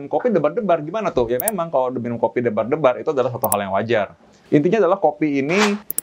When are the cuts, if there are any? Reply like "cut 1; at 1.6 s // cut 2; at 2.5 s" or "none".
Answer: none